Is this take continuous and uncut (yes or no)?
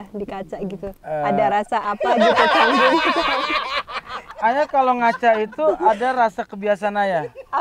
no